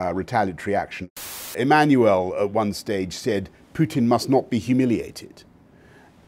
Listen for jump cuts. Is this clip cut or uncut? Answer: cut